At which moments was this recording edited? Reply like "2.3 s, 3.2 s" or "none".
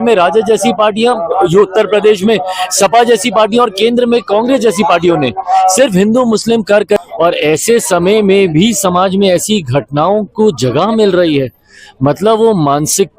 7.0 s